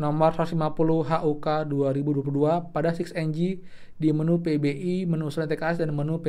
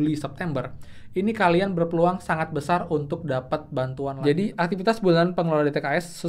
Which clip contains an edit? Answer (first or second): second